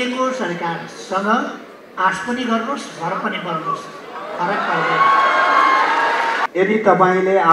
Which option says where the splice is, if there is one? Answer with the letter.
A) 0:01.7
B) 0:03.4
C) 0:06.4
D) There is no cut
C